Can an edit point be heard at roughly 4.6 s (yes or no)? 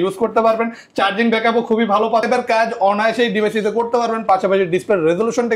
no